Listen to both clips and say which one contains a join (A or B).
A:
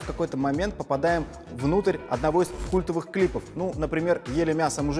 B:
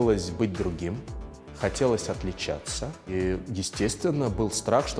B